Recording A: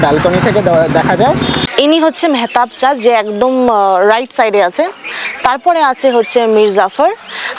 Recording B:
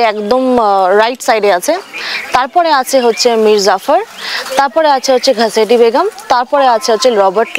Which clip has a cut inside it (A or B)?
A